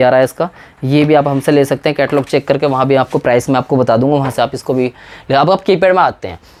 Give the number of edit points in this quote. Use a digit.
0